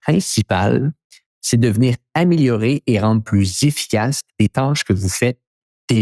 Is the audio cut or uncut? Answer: uncut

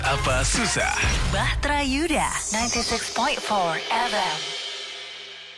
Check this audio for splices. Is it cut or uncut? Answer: uncut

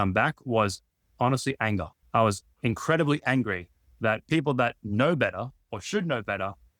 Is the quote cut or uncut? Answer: cut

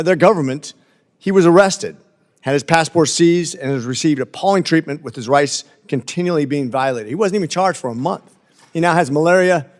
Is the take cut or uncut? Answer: uncut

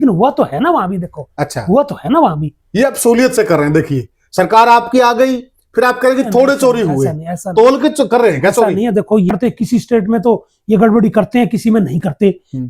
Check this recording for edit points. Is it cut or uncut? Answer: cut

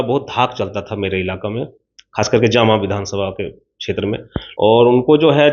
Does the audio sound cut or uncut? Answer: cut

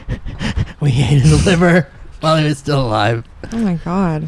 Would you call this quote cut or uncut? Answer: uncut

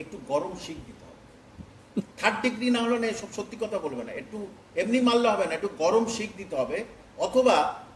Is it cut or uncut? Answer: uncut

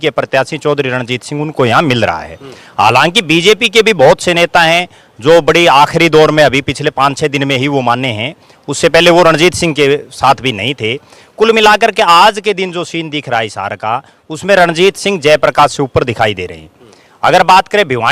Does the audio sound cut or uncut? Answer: uncut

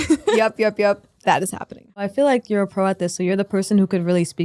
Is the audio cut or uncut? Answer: cut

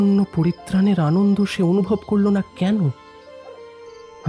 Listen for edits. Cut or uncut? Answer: uncut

